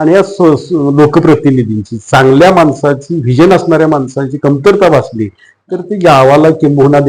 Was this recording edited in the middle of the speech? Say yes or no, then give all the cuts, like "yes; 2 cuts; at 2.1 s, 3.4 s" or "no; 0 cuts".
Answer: no; 0 cuts